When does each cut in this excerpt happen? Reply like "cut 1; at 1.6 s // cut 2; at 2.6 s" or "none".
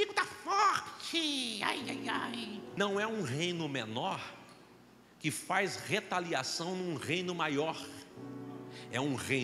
cut 1; at 2.7 s